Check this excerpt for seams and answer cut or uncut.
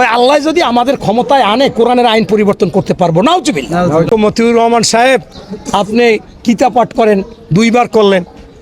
cut